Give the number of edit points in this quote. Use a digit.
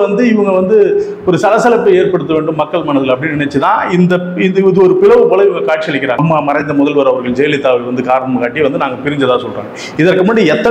1